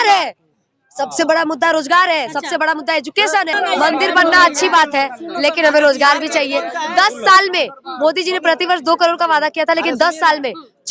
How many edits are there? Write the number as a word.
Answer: one